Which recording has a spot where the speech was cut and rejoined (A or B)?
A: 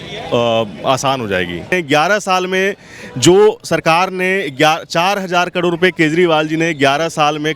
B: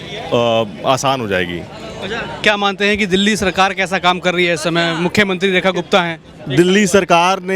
A